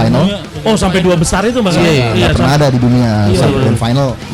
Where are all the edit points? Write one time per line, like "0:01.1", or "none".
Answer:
none